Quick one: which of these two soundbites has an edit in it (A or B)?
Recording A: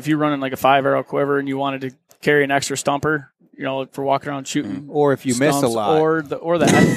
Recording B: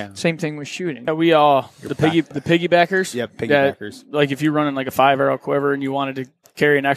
B